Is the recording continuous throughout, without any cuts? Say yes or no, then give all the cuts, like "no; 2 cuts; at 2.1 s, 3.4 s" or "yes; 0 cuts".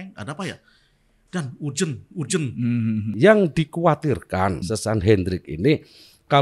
no; 2 cuts; at 3.1 s, 4.6 s